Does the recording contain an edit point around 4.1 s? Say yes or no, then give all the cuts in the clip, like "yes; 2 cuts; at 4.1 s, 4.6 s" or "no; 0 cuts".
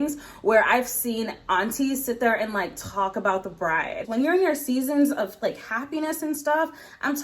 yes; 1 cut; at 4.1 s